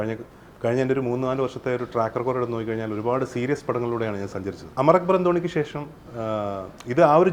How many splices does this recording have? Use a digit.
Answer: 0